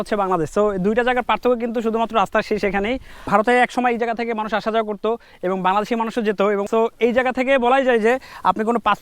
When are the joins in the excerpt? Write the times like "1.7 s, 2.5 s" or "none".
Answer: 3.1 s, 6.7 s